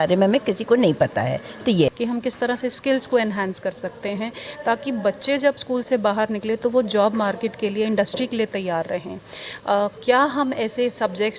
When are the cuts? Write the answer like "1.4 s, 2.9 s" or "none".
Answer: 1.9 s